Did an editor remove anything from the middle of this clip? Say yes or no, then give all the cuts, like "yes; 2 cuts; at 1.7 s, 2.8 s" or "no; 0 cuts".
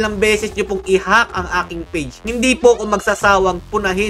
no; 0 cuts